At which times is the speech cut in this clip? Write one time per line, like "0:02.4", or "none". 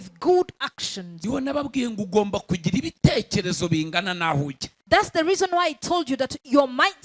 0:01.1